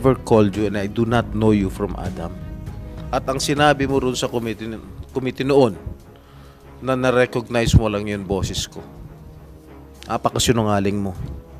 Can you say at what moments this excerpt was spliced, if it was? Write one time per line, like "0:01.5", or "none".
none